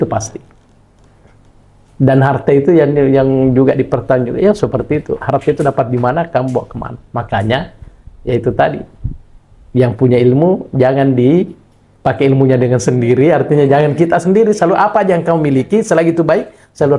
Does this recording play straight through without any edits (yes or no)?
yes